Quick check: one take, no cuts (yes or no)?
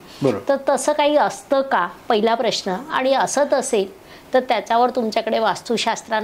yes